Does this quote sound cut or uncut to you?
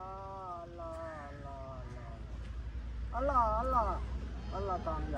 uncut